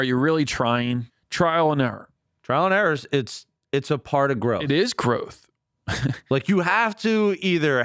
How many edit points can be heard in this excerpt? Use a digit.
1